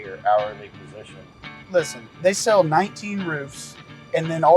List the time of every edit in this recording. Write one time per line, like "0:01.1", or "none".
0:01.6